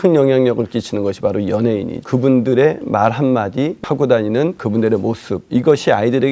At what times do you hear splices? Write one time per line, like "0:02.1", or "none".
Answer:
0:02.0
0:03.8
0:04.6